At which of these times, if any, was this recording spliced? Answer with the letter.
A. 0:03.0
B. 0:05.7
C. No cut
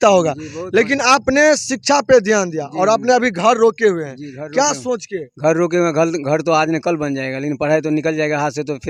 C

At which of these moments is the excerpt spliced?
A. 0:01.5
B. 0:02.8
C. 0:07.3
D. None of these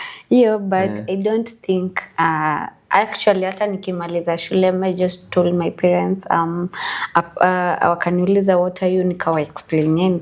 D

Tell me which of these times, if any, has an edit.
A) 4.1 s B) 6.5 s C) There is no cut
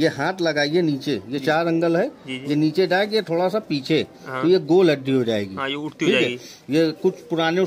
C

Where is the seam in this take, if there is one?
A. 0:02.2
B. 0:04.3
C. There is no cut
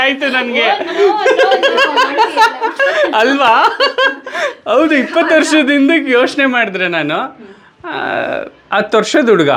C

